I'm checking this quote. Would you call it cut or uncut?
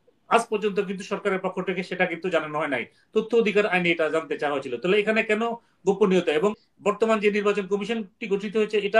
cut